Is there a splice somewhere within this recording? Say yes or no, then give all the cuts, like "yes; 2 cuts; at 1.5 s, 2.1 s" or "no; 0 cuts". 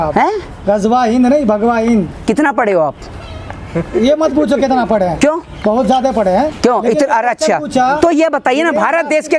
no; 0 cuts